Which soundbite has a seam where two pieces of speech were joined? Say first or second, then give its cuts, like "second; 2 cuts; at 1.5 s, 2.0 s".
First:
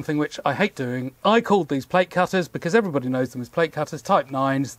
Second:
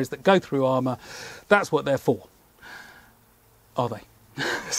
first; 1 cut; at 1.1 s